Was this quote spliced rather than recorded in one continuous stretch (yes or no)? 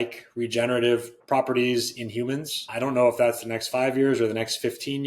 yes